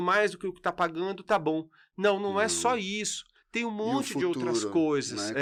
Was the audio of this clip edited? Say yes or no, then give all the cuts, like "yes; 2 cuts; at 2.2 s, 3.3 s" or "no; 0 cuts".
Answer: no; 0 cuts